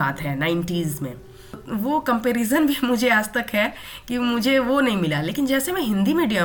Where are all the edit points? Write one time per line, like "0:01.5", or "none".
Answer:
0:01.6